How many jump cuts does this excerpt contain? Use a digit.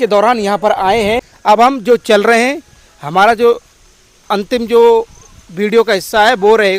1